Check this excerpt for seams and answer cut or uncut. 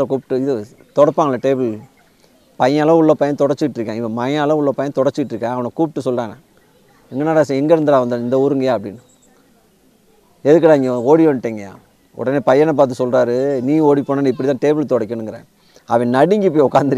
uncut